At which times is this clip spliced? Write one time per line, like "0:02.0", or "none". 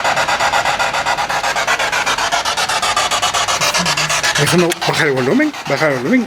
none